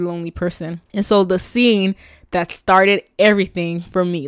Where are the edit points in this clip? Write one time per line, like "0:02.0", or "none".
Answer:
none